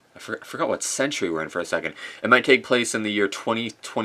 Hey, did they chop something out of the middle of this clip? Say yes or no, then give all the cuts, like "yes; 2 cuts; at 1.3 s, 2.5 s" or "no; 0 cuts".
no; 0 cuts